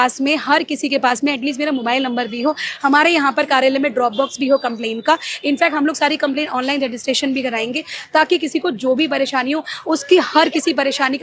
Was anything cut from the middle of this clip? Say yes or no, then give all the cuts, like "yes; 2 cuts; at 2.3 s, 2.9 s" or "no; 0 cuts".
no; 0 cuts